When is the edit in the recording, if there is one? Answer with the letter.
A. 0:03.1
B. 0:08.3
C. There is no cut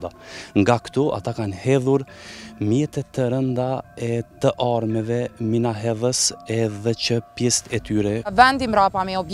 B